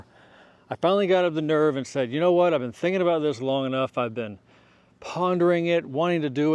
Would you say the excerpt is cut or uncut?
uncut